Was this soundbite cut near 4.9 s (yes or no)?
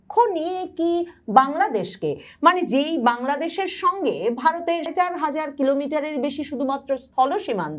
yes